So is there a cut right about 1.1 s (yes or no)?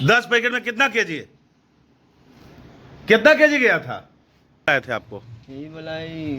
no